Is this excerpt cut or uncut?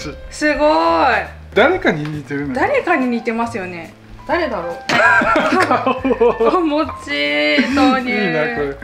cut